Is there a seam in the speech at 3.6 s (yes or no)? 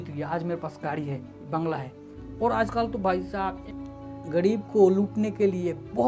yes